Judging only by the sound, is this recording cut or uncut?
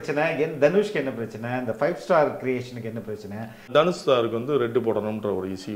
cut